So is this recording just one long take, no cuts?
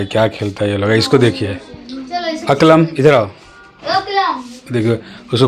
yes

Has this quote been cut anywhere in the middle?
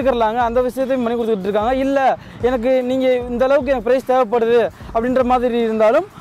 no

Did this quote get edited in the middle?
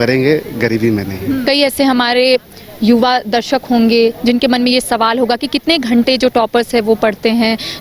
yes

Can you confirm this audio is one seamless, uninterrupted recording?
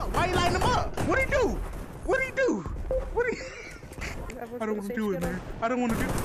no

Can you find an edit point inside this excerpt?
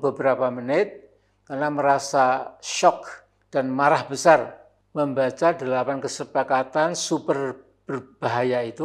no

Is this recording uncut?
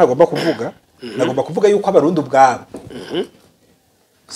yes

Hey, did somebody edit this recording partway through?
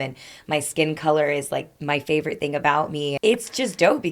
yes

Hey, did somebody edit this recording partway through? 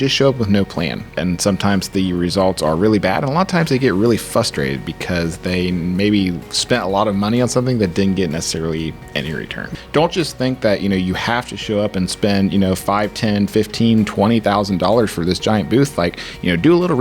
yes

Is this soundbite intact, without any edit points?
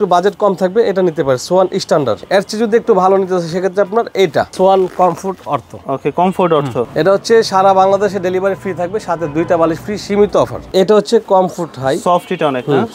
no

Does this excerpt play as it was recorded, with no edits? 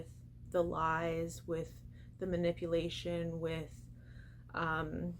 yes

